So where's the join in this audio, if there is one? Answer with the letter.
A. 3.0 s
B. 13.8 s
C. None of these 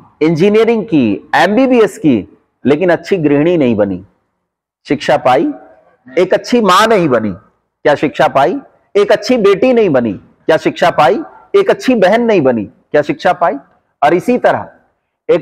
C